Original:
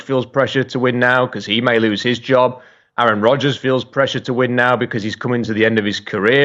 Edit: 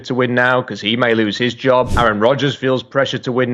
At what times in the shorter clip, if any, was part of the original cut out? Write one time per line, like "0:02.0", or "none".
0:01.9